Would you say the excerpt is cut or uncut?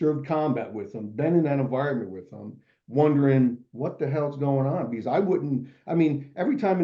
uncut